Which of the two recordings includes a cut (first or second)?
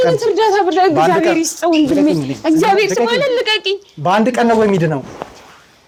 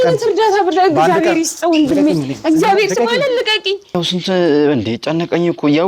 second